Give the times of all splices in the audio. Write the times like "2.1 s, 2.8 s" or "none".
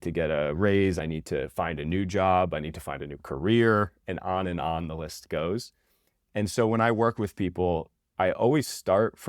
1.0 s, 8.0 s